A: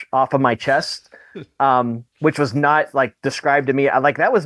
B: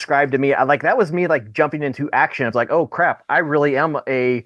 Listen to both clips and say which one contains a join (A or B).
A